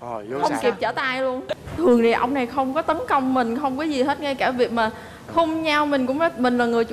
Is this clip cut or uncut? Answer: cut